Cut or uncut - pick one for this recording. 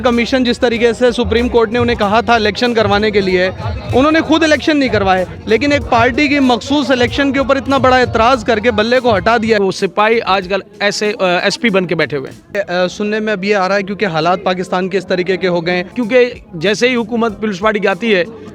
cut